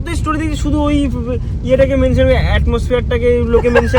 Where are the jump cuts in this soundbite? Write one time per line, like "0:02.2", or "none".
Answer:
none